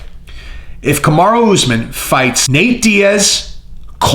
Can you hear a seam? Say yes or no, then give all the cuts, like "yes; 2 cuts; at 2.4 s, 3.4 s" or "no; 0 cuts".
yes; 1 cut; at 2.4 s